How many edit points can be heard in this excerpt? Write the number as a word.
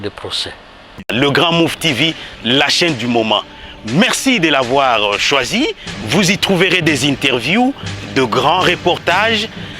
one